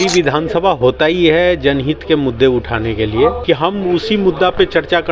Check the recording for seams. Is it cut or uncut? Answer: cut